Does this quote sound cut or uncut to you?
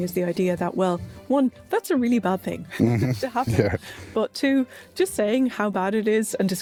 uncut